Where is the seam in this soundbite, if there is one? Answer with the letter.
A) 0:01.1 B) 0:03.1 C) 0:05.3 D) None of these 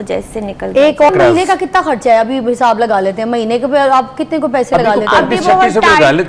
A